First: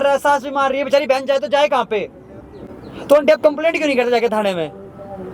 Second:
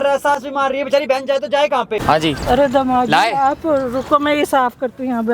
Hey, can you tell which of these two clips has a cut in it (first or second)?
second